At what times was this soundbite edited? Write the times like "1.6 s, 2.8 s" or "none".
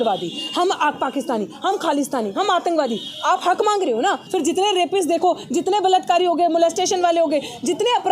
4.2 s